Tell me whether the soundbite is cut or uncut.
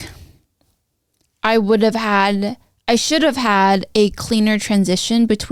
uncut